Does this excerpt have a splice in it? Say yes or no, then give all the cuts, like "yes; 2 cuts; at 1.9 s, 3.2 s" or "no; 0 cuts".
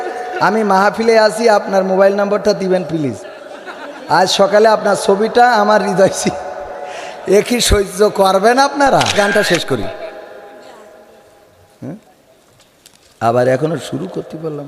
yes; 1 cut; at 9.3 s